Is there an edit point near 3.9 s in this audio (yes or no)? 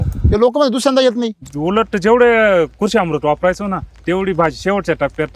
no